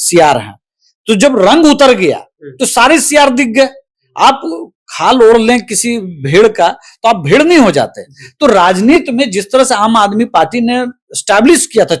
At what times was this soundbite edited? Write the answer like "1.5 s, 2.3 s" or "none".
none